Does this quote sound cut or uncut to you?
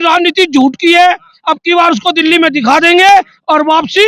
uncut